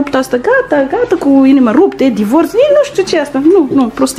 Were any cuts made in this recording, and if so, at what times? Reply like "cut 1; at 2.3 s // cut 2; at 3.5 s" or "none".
none